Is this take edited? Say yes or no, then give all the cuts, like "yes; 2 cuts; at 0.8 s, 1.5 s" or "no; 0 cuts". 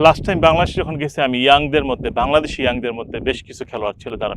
no; 0 cuts